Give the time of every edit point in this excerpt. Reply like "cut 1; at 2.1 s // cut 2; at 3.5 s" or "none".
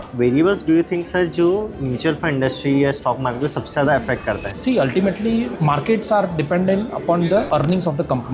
cut 1; at 4.5 s // cut 2; at 7.5 s